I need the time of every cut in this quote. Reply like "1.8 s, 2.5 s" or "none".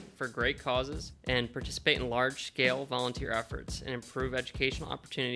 1.1 s

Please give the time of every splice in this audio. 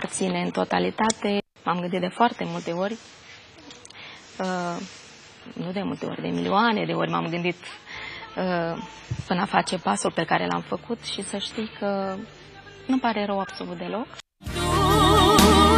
none

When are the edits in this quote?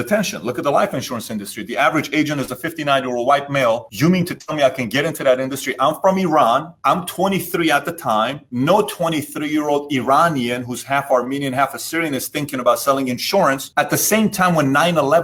none

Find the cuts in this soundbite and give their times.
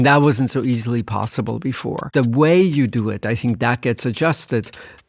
2.0 s

